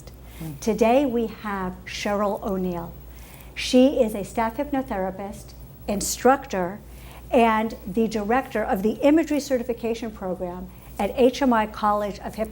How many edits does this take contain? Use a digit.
1